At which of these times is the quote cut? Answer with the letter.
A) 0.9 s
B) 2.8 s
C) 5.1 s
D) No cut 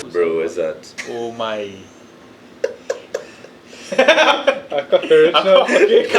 A